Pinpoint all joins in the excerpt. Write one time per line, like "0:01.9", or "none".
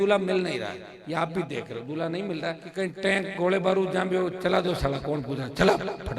0:02.6